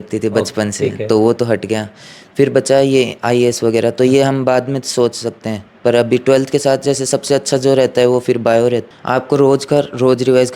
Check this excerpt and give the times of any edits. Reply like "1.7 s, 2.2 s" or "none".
8.9 s